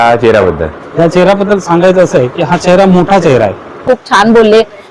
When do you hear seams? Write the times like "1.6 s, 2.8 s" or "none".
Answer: 3.8 s